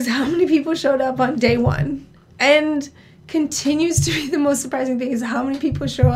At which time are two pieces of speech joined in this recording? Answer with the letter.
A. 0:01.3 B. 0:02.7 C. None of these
A